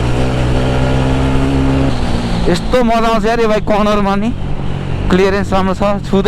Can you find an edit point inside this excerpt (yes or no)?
yes